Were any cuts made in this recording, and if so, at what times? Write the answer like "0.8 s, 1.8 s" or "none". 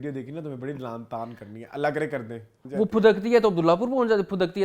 2.5 s